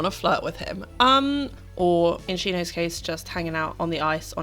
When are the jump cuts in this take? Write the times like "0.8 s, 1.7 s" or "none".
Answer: 1.6 s, 2.2 s